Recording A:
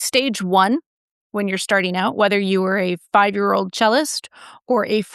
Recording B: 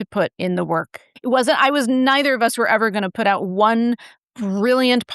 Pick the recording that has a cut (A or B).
B